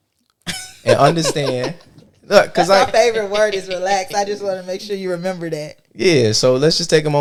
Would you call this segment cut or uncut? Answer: uncut